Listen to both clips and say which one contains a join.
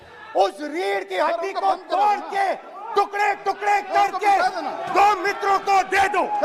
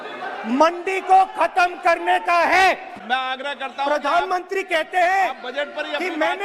second; 1 cut; at 2.9 s

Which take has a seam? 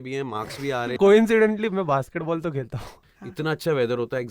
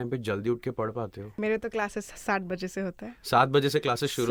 first; 2 cuts; at 1.0 s, 2.9 s

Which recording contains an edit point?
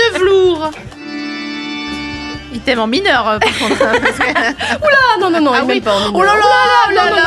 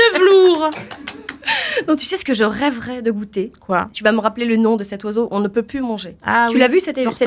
first; 1 cut; at 1.0 s

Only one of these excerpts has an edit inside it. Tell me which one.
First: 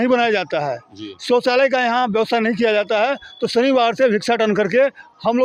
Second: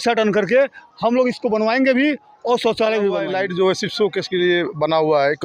second; 1 cut; at 3.3 s

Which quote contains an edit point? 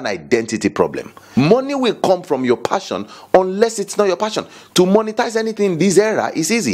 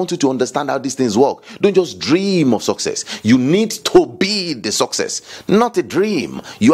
first; 1 cut; at 1.2 s

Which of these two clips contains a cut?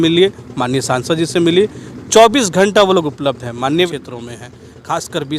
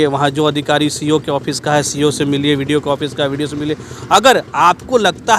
first; 1 cut; at 3.9 s

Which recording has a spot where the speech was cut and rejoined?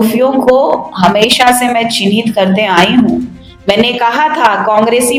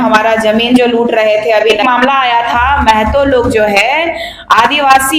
second; 1 cut; at 1.8 s

